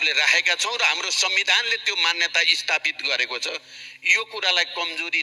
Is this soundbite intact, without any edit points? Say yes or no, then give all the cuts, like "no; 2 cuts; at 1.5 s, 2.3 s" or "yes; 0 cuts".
yes; 0 cuts